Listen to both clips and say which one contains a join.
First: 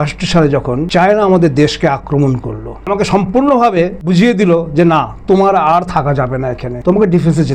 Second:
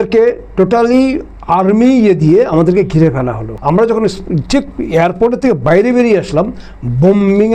first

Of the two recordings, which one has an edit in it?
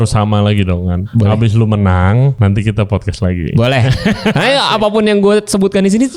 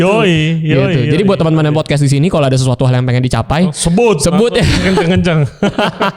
first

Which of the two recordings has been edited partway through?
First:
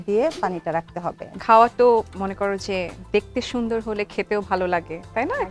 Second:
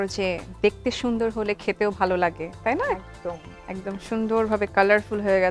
first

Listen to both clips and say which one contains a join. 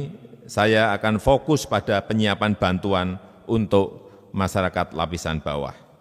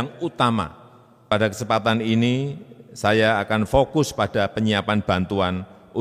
second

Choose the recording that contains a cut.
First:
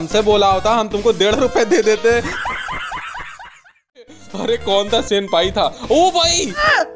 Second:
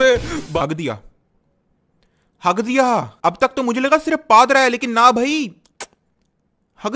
first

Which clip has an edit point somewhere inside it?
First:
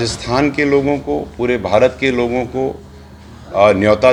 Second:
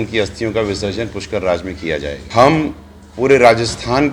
second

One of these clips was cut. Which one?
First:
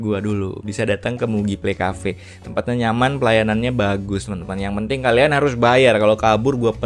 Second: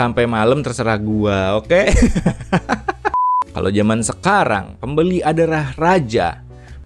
second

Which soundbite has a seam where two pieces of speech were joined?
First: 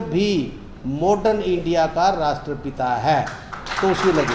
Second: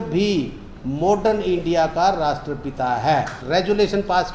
second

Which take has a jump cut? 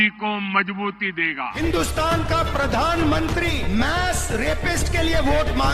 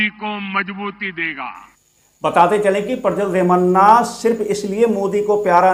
first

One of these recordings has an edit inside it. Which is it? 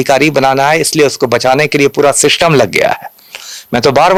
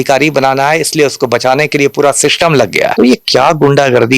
second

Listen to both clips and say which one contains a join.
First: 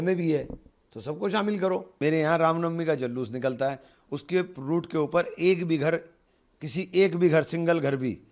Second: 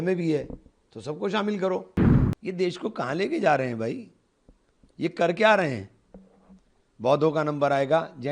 second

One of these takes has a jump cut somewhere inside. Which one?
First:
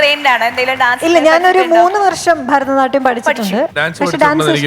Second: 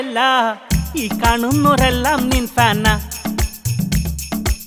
first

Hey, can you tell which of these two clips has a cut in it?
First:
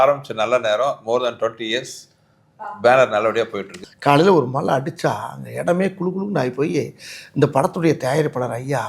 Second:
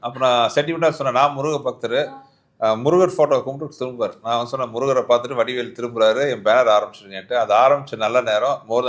first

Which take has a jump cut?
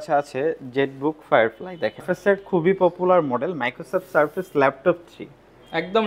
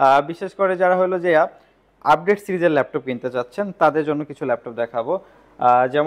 first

